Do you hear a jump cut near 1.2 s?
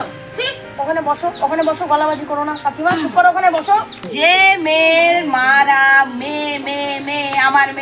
no; 1 cut; at 4.0 s

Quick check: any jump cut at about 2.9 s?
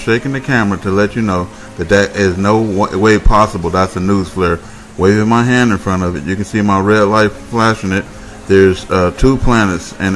yes; 1 cut; at 2.9 s

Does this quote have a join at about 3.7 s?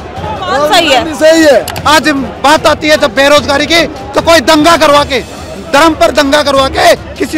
no; 1 cut; at 1.8 s

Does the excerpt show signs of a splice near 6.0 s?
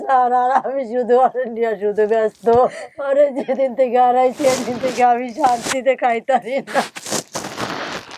no; 1 cut; at 2.9 s

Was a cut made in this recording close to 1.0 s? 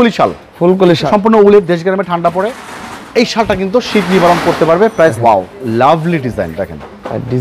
yes; 2 cuts; at 1.0 s, 5.2 s

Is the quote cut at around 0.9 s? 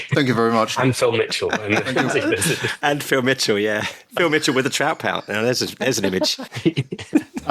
no; 1 cut; at 6.5 s

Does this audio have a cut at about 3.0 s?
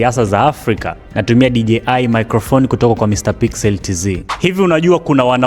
no; 1 cut; at 4.3 s

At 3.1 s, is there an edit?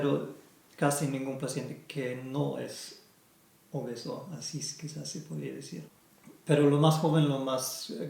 no; 1 cut; at 6.0 s

